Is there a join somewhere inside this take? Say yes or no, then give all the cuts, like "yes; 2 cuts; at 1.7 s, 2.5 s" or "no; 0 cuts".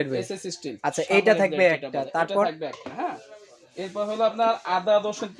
no; 0 cuts